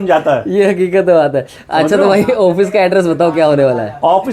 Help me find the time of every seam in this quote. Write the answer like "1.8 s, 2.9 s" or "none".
none